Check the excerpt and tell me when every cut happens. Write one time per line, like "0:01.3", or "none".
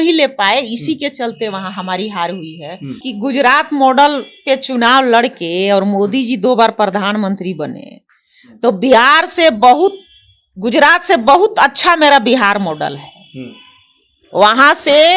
0:03.0